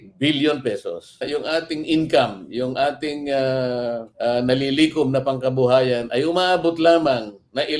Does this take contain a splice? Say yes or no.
yes